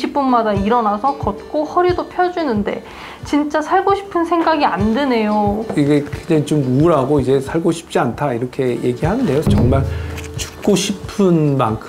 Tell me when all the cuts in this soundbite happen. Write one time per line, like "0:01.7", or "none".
none